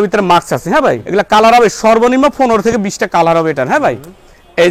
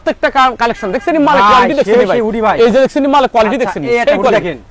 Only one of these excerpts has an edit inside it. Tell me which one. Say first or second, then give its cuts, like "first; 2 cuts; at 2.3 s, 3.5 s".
first; 1 cut; at 1.0 s